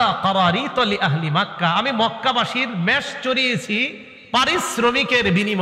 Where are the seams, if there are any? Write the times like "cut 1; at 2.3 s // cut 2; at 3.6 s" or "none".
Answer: none